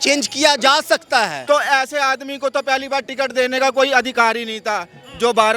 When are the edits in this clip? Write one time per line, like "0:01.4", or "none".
0:01.4